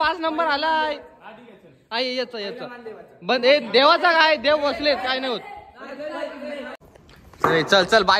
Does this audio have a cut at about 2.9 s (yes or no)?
no